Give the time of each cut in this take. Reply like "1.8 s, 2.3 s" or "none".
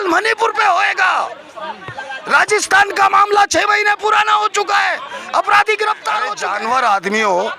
6.4 s